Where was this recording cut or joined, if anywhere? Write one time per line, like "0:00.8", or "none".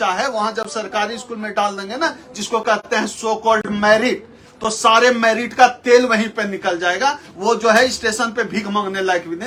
none